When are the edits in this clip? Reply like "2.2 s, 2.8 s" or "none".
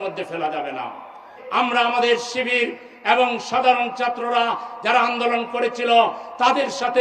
1.3 s